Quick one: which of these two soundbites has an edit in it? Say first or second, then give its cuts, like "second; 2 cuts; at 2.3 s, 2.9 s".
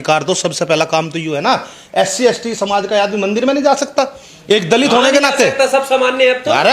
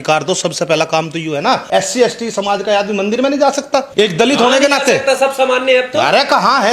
second; 2 cuts; at 1.6 s, 3.9 s